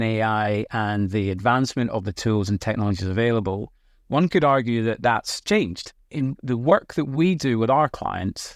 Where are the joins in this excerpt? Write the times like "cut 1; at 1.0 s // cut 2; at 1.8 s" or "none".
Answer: cut 1; at 6.0 s